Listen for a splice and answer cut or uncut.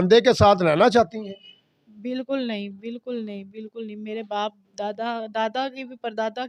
uncut